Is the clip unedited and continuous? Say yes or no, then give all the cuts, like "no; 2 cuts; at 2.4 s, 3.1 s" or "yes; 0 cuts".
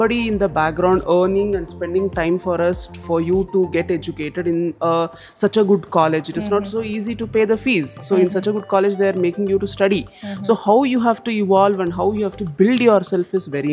yes; 0 cuts